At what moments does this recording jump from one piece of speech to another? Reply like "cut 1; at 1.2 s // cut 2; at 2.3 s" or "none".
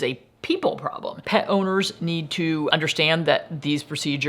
cut 1; at 1.2 s // cut 2; at 2.7 s